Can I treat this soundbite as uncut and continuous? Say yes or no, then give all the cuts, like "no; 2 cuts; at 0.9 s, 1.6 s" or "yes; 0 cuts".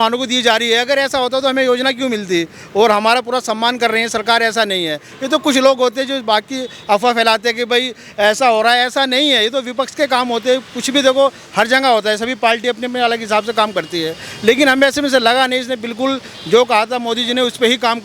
yes; 0 cuts